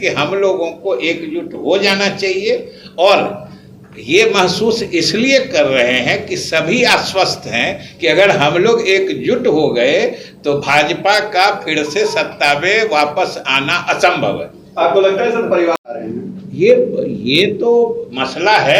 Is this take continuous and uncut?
yes; 0 cuts

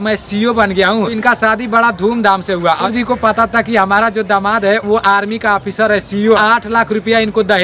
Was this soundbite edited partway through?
yes; 3 cuts; at 1.2 s, 2.8 s, 6.4 s

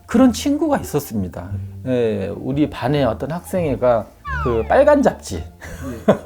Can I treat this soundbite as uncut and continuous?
no; 1 cut; at 1.5 s

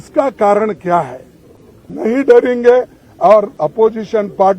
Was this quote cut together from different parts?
yes; 1 cut; at 1.8 s

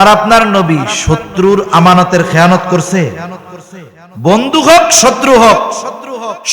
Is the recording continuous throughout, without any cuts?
yes; 0 cuts

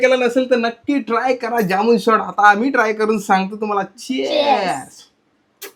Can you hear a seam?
no; 0 cuts

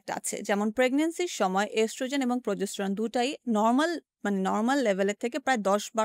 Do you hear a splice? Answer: no; 0 cuts

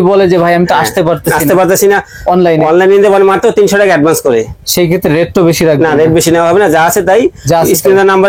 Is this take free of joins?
yes; 0 cuts

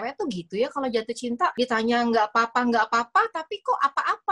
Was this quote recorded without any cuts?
no; 1 cut; at 1.5 s

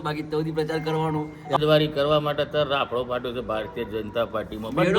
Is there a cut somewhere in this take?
yes; 1 cut; at 1.6 s

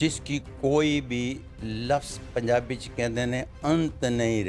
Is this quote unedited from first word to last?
yes; 0 cuts

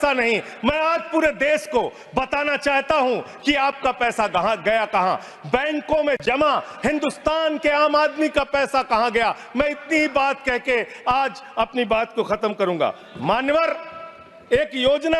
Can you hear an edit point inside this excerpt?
no; 0 cuts

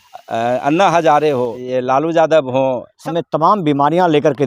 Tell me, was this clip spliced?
yes; 2 cuts; at 1.6 s, 2.9 s

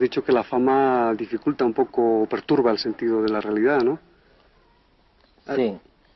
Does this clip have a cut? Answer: yes; 1 cut; at 2.9 s

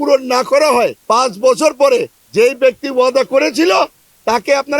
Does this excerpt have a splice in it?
yes; 2 cuts; at 1.0 s, 2.2 s

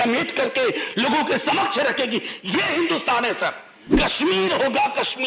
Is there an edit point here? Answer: yes; 1 cut; at 3.9 s

